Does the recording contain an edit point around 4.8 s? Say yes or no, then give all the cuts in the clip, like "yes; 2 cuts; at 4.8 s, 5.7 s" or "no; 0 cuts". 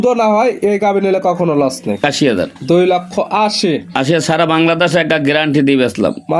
no; 1 cut; at 2.1 s